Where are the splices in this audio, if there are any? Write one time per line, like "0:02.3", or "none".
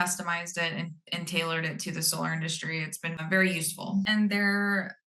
none